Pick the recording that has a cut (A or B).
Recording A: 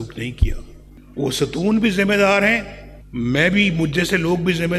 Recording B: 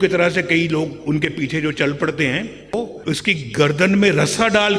B